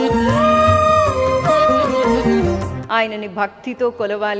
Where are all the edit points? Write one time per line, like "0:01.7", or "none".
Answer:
0:02.7